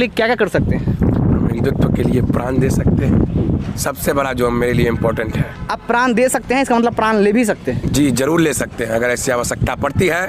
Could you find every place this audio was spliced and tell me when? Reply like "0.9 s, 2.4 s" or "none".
none